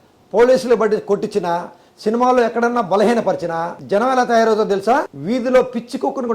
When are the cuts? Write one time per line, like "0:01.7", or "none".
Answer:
0:03.7
0:05.2